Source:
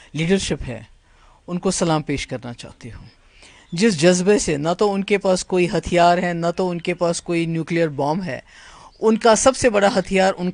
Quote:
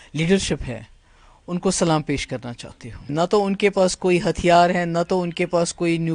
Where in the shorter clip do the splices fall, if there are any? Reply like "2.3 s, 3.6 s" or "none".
3.1 s